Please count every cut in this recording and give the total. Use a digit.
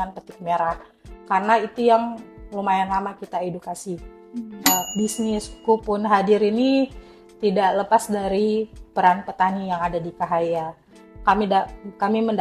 1